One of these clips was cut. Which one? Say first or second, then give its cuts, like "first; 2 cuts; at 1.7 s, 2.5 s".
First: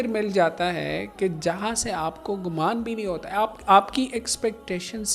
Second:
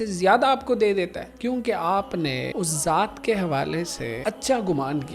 second; 3 cuts; at 1.2 s, 2.5 s, 4.2 s